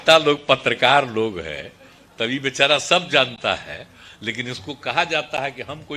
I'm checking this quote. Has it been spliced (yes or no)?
no